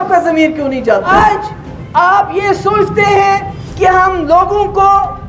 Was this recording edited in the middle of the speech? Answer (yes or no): yes